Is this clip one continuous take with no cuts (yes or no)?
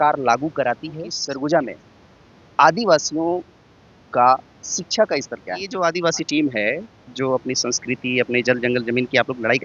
no